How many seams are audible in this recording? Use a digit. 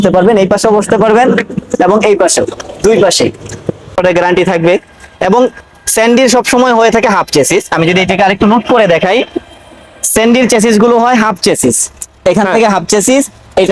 1